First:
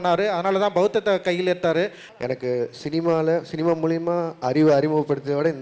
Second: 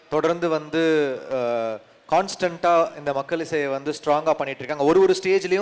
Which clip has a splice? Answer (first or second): first